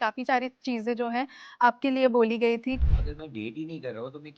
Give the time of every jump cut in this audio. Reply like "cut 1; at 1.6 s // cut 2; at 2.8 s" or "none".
cut 1; at 2.8 s